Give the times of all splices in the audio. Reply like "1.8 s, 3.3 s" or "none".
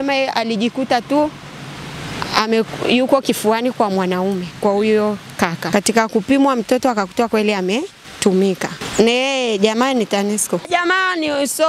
5.6 s, 8.0 s, 8.8 s

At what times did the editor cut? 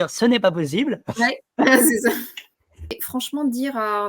3.0 s

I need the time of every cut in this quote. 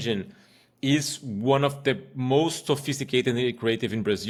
none

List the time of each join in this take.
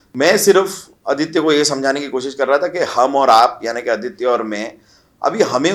none

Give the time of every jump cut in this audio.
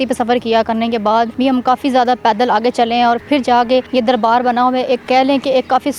1.3 s, 3.9 s

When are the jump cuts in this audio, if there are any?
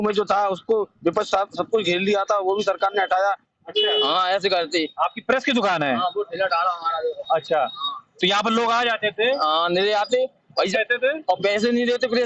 3.5 s

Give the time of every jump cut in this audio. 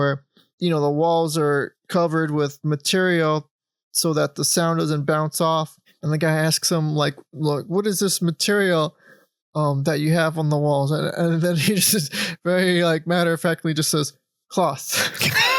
1.8 s, 5.9 s

